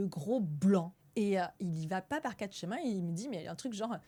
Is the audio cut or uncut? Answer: uncut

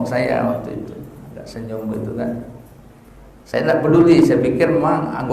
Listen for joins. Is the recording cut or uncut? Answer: uncut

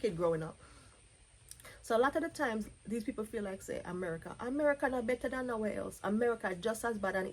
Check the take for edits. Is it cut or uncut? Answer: uncut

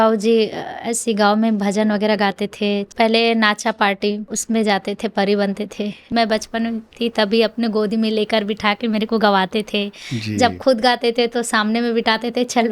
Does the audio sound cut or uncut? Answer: cut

